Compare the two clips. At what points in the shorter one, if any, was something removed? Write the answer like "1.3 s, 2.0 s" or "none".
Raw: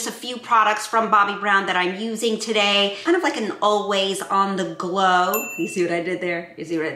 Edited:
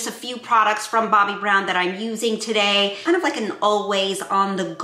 none